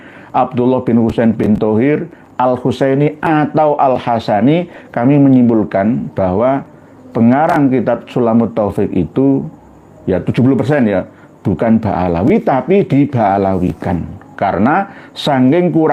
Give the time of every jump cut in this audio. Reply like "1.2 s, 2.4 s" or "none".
none